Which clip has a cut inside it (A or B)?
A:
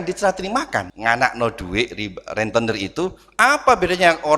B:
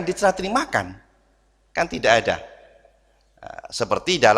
A